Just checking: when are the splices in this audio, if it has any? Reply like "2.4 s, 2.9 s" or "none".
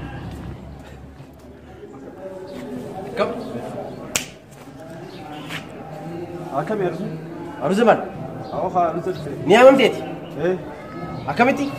1.3 s